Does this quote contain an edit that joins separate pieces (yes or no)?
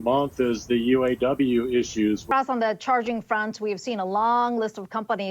yes